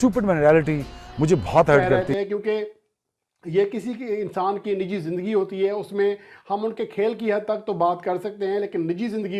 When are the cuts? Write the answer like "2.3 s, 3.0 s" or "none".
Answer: 2.0 s